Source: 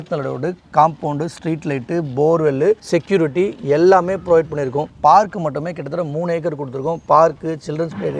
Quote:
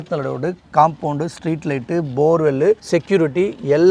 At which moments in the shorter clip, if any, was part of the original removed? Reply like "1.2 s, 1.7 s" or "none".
none